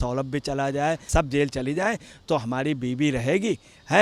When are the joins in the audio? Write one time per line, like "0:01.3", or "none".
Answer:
0:01.1